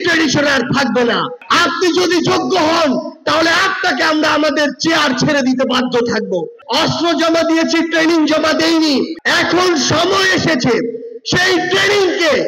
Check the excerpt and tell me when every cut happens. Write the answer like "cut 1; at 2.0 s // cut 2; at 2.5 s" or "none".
cut 1; at 1.4 s // cut 2; at 6.6 s // cut 3; at 9.2 s